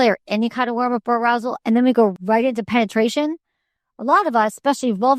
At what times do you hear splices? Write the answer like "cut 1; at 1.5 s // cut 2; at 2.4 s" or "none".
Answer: cut 1; at 2.1 s

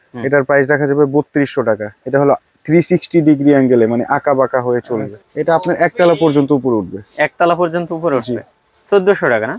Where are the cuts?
cut 1; at 5.1 s

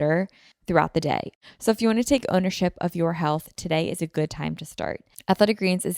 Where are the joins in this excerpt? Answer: cut 1; at 1.3 s // cut 2; at 5.1 s

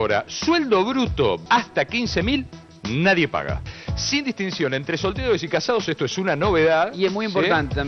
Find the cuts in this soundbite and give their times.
none

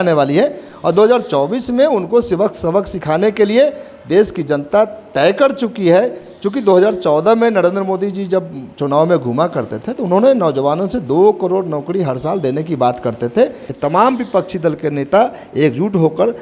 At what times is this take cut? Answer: cut 1; at 13.7 s

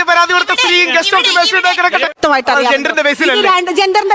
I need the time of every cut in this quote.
cut 1; at 2.2 s

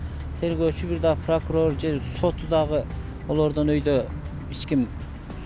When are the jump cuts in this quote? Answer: none

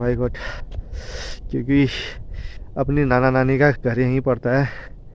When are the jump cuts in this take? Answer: none

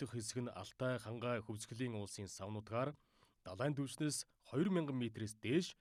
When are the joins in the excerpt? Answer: none

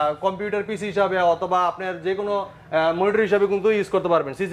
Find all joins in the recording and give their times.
none

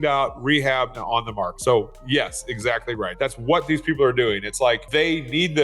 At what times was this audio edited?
cut 1; at 1.5 s // cut 2; at 3.1 s // cut 3; at 4.8 s

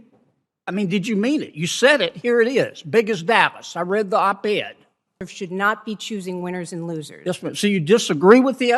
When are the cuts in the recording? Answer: cut 1; at 5.2 s

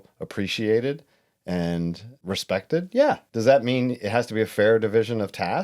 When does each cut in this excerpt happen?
cut 1; at 2.2 s // cut 2; at 3.3 s

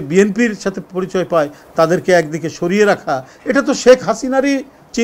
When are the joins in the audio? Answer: none

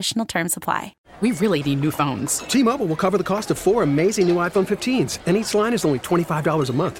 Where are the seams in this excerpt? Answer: cut 1; at 1.0 s

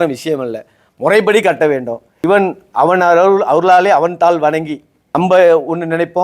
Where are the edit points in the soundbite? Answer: cut 1; at 2.1 s // cut 2; at 5.2 s

